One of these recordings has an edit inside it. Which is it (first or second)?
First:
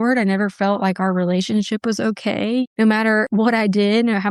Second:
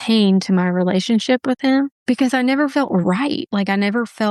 first